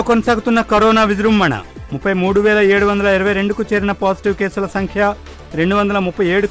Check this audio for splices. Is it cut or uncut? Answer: uncut